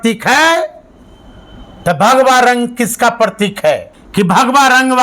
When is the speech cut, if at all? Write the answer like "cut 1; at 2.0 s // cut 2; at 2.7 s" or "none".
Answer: cut 1; at 4.0 s